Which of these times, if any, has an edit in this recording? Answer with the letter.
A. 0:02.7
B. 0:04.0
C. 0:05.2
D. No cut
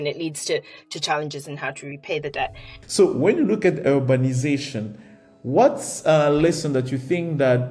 A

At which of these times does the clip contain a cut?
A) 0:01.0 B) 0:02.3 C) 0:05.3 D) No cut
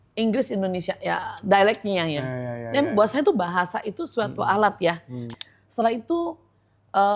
C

